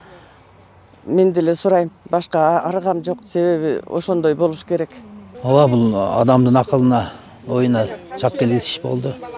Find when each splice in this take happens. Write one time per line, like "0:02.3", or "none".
0:05.3